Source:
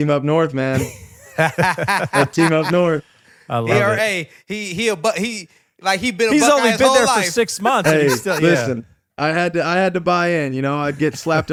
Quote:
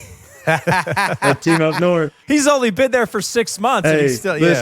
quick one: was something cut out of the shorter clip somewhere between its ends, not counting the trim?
yes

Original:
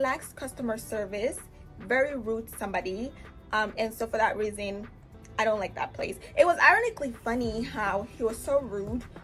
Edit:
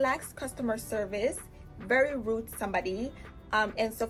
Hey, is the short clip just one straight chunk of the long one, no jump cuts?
yes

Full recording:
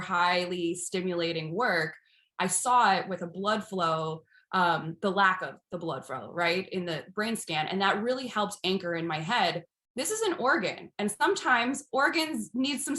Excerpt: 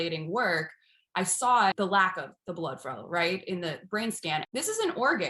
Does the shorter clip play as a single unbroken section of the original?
no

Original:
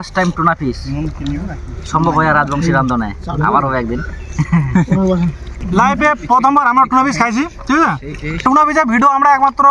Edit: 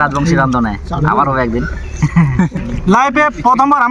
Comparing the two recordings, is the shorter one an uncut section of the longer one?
no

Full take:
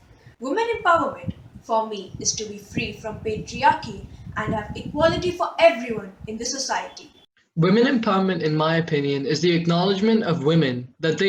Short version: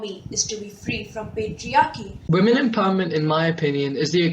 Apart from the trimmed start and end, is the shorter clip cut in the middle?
yes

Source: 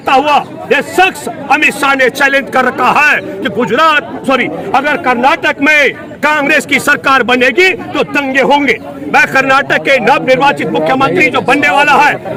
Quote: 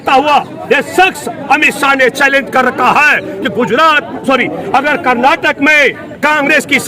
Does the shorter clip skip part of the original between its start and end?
no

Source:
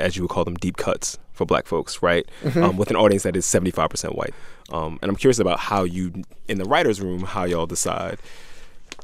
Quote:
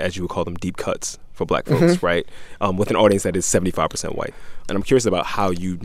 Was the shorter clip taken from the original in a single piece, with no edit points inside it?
no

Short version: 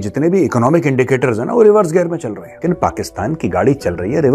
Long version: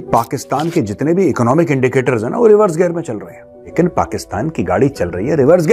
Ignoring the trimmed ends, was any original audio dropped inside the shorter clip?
yes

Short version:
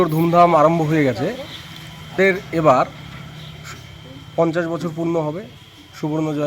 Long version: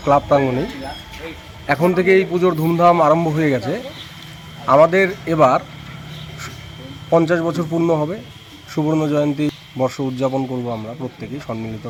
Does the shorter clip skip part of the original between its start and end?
yes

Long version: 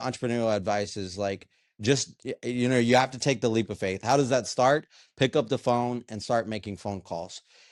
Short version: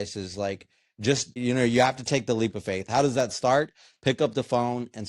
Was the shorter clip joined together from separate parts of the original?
yes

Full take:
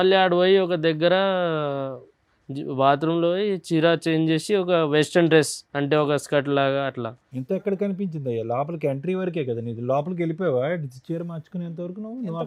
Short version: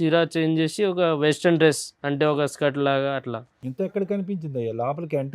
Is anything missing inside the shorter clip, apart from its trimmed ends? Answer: no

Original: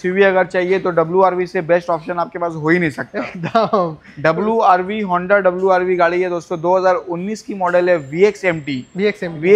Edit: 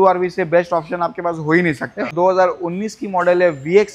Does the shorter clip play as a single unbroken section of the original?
no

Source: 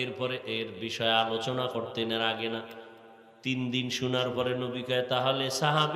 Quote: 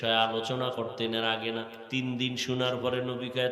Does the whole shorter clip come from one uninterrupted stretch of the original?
no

